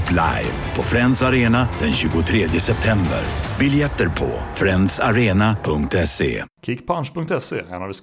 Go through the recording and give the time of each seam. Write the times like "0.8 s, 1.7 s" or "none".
6.5 s

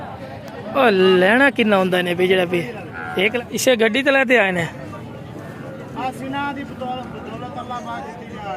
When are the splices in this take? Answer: 3.3 s

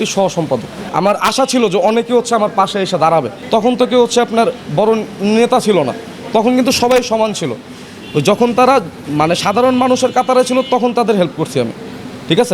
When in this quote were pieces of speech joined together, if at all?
0.8 s, 3.4 s

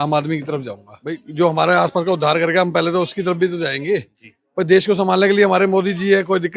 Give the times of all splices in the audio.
1.3 s

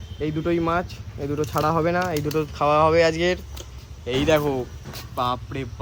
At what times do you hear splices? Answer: none

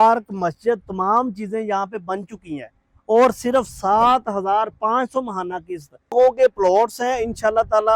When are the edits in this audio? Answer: 6.1 s

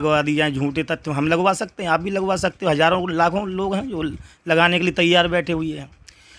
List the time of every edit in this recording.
none

